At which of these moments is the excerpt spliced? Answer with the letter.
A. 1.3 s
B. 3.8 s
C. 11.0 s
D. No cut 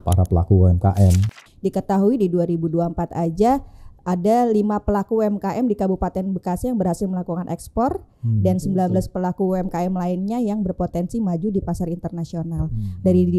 A